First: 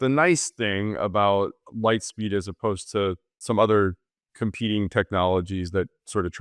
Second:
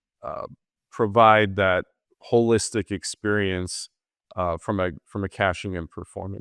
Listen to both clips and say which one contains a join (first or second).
first